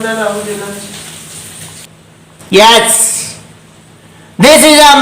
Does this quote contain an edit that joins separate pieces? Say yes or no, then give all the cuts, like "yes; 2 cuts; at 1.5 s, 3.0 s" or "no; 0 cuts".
yes; 1 cut; at 1.9 s